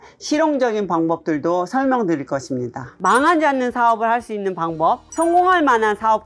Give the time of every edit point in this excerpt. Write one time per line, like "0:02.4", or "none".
0:02.8
0:05.1